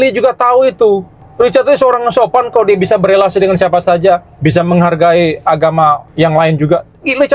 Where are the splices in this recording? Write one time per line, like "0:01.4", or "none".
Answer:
0:01.2
0:04.3
0:06.1